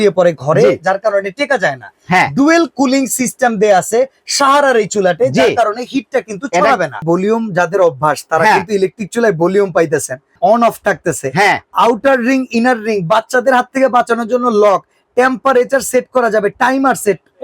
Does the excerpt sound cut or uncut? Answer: cut